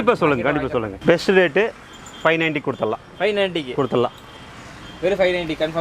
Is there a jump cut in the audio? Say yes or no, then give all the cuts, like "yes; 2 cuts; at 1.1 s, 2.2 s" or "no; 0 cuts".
yes; 1 cut; at 0.9 s